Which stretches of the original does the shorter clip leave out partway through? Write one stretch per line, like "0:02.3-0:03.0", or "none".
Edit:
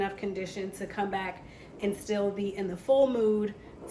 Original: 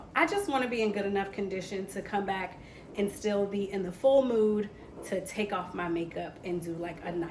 none